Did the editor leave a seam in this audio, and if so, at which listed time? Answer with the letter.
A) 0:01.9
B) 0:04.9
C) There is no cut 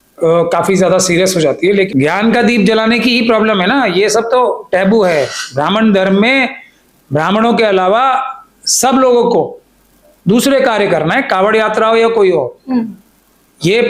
A